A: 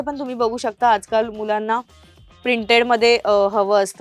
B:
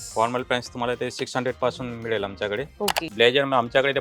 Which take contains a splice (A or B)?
B